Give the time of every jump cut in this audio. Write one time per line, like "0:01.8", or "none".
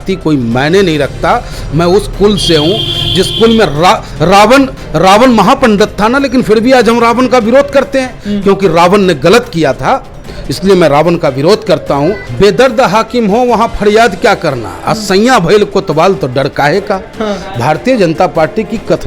0:12.3